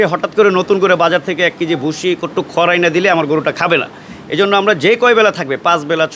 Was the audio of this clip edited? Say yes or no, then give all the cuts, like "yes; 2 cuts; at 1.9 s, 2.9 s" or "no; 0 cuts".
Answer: no; 0 cuts